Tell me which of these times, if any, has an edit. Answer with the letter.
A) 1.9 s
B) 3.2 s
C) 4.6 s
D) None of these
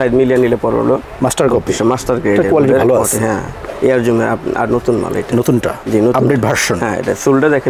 D